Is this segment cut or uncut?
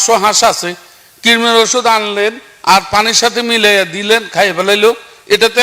uncut